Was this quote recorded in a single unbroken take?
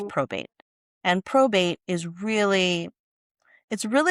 yes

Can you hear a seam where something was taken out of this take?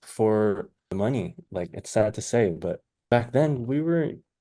yes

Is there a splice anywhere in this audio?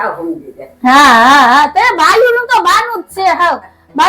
no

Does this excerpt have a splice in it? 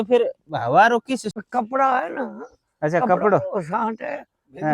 yes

